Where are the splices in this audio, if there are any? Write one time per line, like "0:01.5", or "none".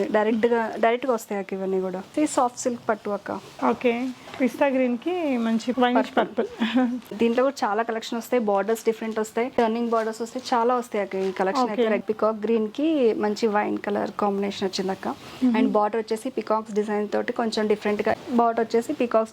0:02.1
0:05.7
0:07.1
0:09.5
0:12.0
0:18.2